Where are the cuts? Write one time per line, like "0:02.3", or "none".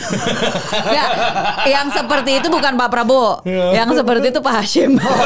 none